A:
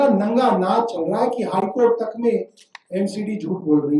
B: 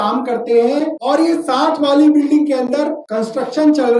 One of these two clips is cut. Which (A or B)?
B